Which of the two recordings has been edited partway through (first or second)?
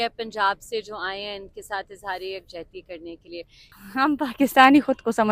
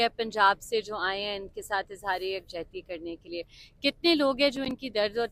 first